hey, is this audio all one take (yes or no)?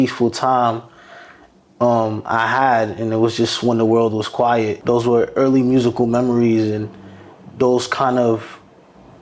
no